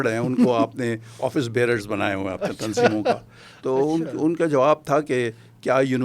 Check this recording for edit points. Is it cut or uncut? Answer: uncut